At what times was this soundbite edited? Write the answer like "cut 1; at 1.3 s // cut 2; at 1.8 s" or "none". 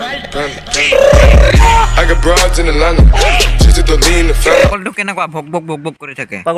none